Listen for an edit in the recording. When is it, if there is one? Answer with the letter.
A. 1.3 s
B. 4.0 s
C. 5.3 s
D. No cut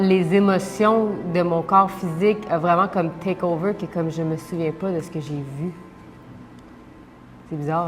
D